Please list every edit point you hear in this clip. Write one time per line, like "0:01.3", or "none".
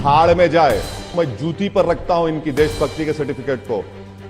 0:01.0